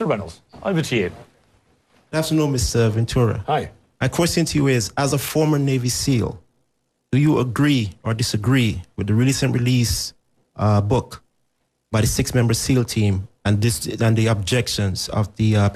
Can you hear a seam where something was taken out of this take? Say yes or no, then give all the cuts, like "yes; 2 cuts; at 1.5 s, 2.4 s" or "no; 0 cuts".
no; 0 cuts